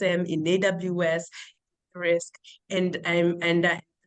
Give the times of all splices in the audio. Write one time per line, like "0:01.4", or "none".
none